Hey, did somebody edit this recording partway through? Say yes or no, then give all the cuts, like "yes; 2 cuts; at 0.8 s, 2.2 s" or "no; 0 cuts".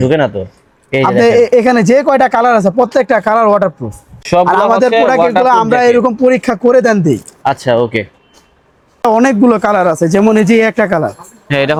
no; 0 cuts